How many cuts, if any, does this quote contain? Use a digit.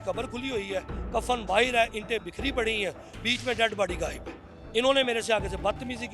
0